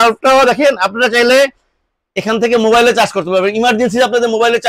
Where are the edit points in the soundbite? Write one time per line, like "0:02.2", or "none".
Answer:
none